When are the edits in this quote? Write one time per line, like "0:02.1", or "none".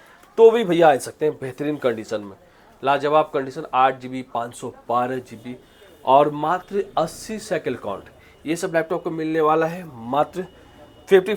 none